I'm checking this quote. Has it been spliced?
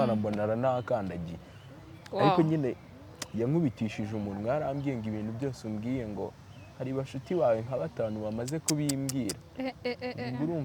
no; 0 cuts

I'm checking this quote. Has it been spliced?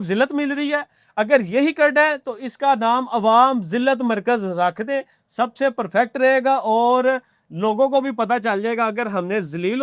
no; 0 cuts

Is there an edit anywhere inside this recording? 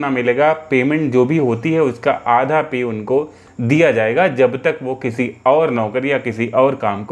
no; 0 cuts

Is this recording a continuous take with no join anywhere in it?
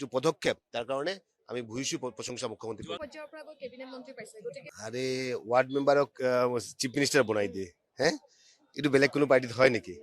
no; 1 cut; at 4.7 s

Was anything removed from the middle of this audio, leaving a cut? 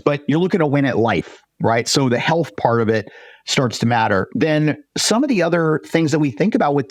no; 0 cuts

